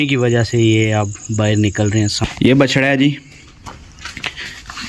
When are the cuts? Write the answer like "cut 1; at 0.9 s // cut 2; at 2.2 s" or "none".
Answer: cut 1; at 2.2 s